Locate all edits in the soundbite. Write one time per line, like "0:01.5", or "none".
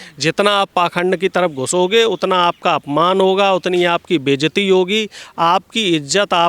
none